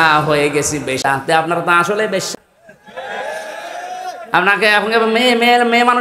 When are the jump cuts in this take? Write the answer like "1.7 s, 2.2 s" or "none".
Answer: 1.0 s, 2.3 s